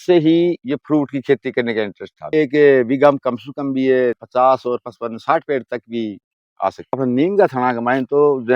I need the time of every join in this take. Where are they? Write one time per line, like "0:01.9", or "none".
0:02.3
0:04.2
0:07.0